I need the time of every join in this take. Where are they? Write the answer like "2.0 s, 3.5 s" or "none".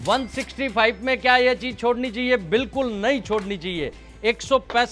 none